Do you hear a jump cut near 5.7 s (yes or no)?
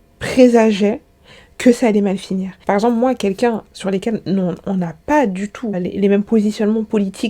no